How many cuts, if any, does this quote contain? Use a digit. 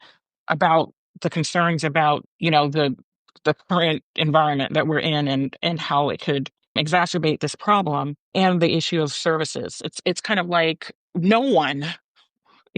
4